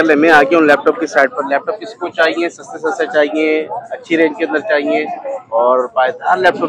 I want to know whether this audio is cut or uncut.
uncut